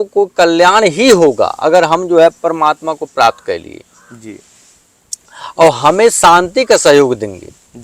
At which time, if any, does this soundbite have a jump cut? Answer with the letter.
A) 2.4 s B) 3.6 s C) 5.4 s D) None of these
D